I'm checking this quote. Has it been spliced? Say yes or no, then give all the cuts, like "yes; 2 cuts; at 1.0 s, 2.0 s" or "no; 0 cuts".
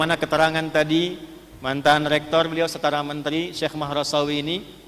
no; 0 cuts